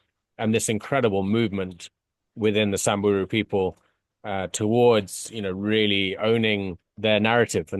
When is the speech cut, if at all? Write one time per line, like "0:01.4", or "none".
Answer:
0:06.9